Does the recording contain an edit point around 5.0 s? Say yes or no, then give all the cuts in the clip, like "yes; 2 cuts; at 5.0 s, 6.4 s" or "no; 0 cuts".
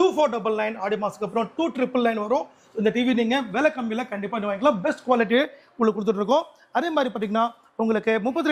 no; 0 cuts